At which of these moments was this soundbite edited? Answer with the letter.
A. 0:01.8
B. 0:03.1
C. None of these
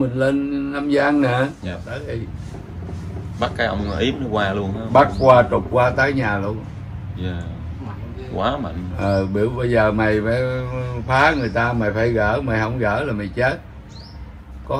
A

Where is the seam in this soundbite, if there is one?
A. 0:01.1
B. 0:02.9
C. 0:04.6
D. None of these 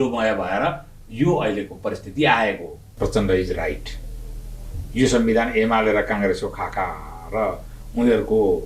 B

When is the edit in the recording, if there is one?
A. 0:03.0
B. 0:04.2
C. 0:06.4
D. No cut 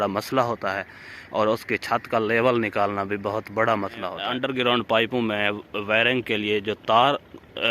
B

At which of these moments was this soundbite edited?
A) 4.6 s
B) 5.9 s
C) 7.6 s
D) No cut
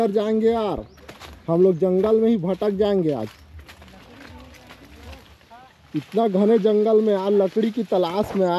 B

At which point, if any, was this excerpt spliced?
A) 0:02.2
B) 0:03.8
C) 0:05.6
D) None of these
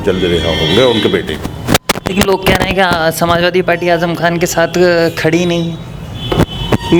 D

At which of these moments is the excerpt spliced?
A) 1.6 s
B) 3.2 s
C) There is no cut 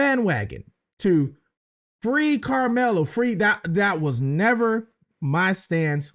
C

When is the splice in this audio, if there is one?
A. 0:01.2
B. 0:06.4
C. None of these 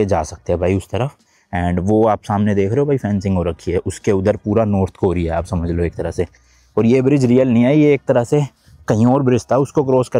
C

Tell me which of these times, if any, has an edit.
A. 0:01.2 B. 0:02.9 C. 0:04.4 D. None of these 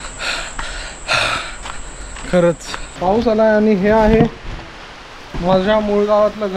B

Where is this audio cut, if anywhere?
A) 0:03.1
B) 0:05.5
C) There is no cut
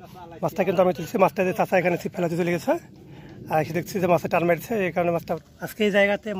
B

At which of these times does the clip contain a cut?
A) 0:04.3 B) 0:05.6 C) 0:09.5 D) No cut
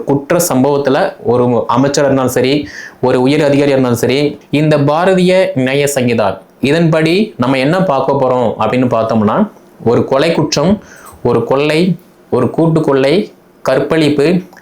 A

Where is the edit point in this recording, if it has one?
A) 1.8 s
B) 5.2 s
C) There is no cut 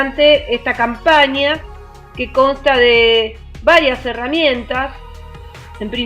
B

